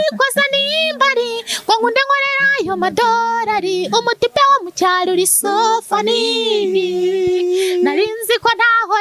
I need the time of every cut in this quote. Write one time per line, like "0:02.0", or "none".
none

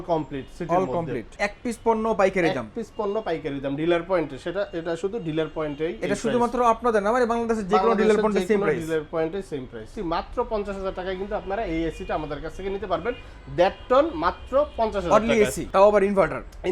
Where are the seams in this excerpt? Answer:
0:01.3
0:09.9
0:15.6

